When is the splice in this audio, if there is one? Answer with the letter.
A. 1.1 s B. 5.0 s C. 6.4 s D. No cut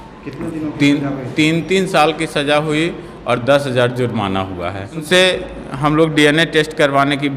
B